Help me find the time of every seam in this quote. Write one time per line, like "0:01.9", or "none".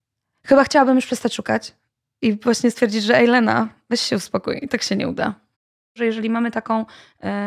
0:06.0